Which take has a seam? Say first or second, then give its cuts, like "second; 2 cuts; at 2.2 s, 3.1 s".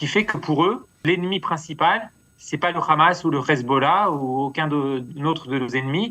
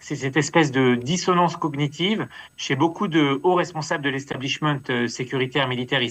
first; 1 cut; at 0.9 s